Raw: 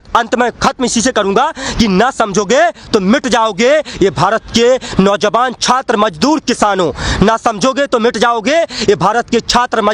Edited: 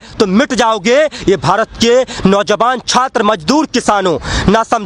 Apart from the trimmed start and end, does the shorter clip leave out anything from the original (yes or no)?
no